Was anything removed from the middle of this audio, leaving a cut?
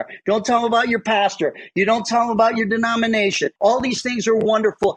yes; 1 cut; at 3.5 s

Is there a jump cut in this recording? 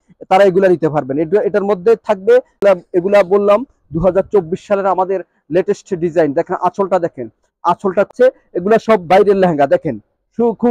yes; 2 cuts; at 2.6 s, 8.1 s

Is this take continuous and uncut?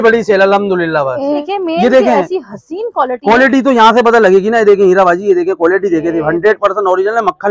no; 1 cut; at 1.4 s

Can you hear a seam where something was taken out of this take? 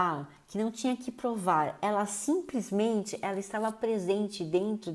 no; 0 cuts

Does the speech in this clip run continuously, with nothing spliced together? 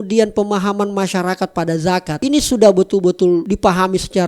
no; 2 cuts; at 2.2 s, 3.4 s

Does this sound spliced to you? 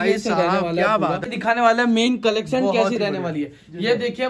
yes; 1 cut; at 1.2 s

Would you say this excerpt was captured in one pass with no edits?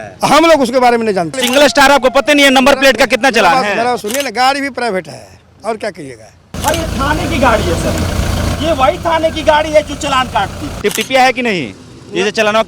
no; 4 cuts; at 1.4 s, 4.0 s, 6.5 s, 10.6 s

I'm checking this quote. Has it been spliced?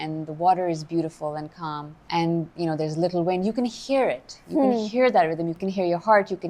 yes; 2 cuts; at 1.9 s, 5.6 s

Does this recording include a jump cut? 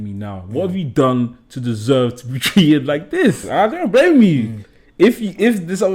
yes; 1 cut; at 3.4 s

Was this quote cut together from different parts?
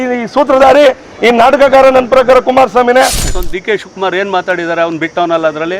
yes; 1 cut; at 3.3 s

